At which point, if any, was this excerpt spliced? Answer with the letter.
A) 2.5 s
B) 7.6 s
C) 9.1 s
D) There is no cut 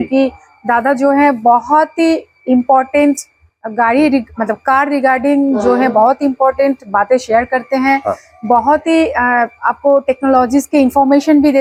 D